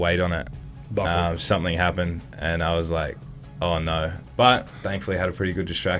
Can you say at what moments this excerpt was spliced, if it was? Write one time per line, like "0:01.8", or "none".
0:04.2